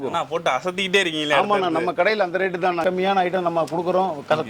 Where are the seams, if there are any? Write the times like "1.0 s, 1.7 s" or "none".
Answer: 2.8 s